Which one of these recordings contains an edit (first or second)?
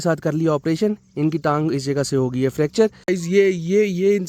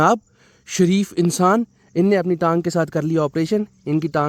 first